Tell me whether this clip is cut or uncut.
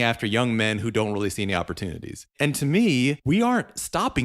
cut